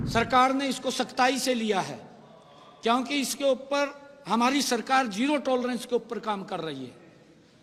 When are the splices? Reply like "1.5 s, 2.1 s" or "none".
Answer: none